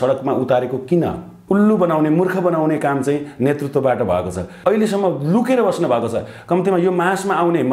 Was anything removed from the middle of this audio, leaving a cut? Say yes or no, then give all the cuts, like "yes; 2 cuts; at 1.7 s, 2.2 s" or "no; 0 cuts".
yes; 2 cuts; at 1.4 s, 4.5 s